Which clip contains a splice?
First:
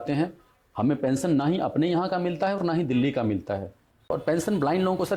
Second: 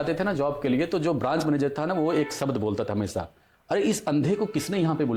first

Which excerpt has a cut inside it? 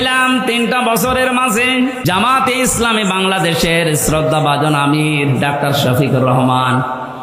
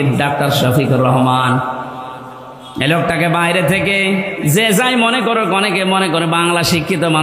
first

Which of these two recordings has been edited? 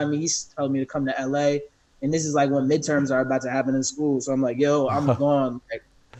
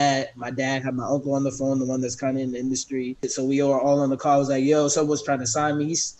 second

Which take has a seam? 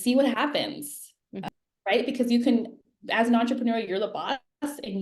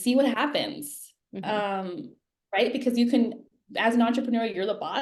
first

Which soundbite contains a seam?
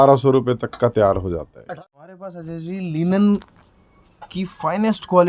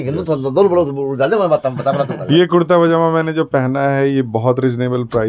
first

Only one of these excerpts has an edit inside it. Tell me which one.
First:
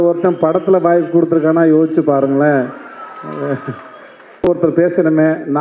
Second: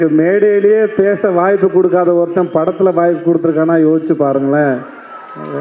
first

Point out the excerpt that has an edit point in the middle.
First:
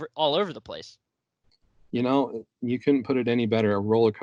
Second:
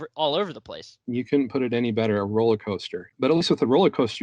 second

